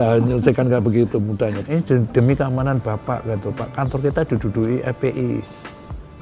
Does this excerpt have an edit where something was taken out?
yes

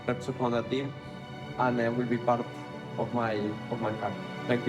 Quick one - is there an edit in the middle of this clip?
no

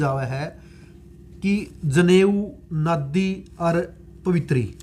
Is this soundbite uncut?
yes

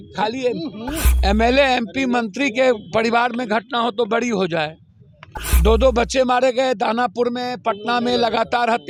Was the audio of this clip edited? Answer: no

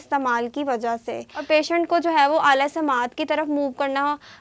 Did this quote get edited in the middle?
yes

